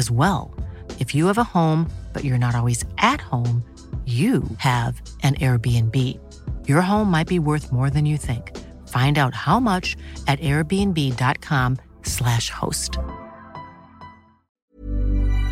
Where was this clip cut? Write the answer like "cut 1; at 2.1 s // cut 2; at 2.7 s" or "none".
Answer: cut 1; at 14.6 s